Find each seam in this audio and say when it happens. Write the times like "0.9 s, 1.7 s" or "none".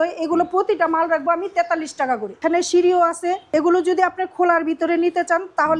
2.4 s, 3.4 s